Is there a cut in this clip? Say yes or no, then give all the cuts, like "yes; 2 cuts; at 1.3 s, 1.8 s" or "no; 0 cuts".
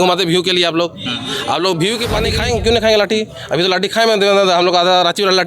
yes; 1 cut; at 2.3 s